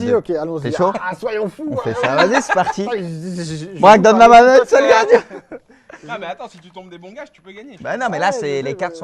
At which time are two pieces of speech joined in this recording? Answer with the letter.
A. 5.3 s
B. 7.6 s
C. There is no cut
B